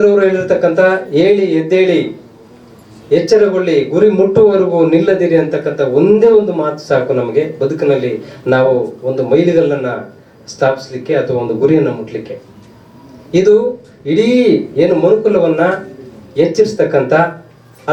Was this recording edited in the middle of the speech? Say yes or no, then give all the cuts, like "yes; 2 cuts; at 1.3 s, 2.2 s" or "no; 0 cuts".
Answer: no; 0 cuts